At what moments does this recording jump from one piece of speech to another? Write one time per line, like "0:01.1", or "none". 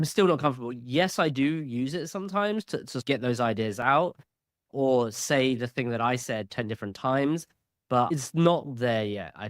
0:08.1